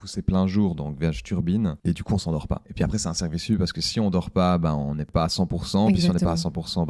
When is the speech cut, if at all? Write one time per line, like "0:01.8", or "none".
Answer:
0:01.8
0:05.1